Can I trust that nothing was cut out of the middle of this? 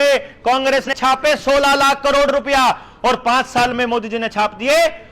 no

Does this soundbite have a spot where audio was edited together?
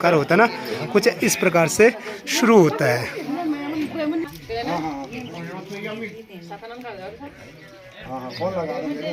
yes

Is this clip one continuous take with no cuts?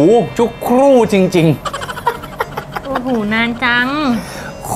yes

